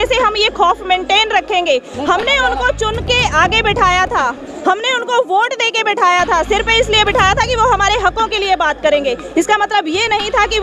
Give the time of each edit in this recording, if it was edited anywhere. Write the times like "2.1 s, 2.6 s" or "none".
none